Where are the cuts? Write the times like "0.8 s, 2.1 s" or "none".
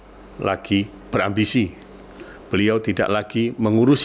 1.0 s